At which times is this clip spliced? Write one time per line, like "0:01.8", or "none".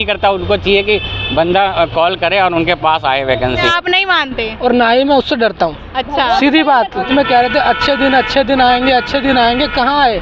0:03.7
0:07.0

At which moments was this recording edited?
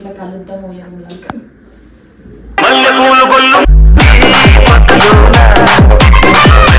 none

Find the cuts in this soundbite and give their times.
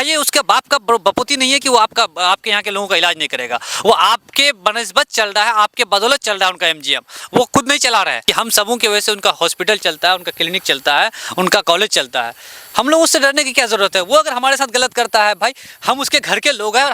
0:08.2

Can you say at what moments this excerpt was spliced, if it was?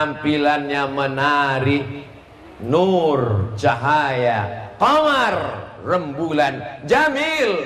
none

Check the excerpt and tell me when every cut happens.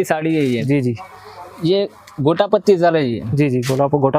none

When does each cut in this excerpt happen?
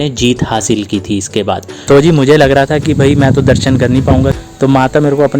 0:01.7
0:04.3

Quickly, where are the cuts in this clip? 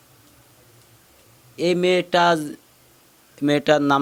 none

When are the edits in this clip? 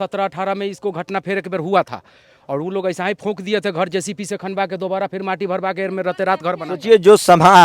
none

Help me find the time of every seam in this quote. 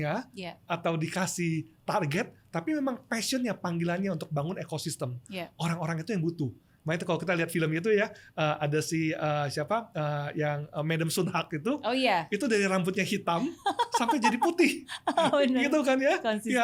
none

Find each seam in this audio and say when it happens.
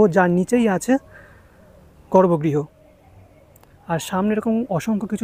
none

